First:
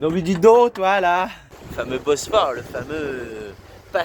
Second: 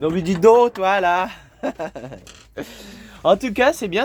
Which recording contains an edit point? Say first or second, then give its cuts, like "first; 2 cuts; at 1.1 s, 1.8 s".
first; 1 cut; at 1.4 s